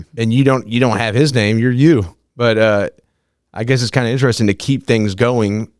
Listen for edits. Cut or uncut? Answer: uncut